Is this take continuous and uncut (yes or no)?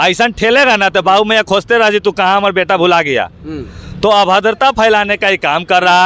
yes